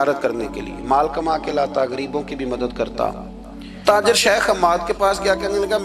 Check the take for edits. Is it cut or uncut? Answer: cut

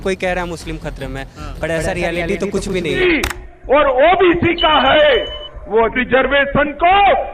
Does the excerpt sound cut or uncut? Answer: cut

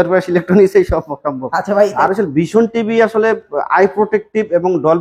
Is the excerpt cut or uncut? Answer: cut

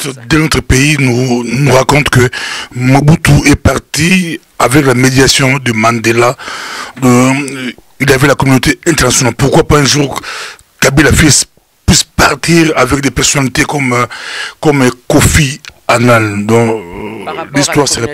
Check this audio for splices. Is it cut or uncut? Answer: uncut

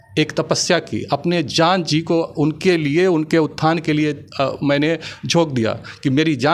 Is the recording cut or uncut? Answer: uncut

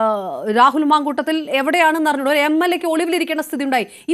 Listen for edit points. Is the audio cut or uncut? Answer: uncut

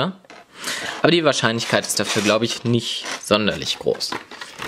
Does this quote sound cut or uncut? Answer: cut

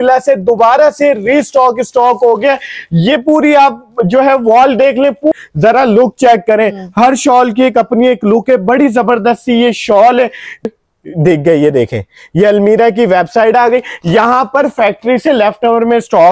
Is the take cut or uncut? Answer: cut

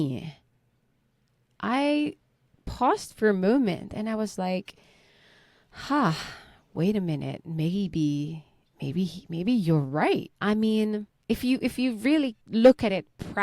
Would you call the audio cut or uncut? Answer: cut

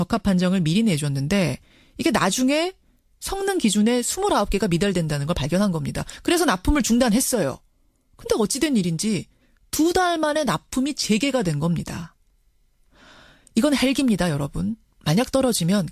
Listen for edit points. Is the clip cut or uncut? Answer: cut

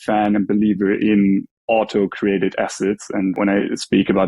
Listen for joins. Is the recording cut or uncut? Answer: cut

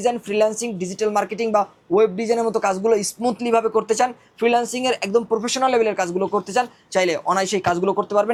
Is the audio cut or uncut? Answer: uncut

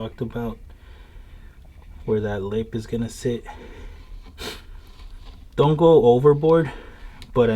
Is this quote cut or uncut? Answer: uncut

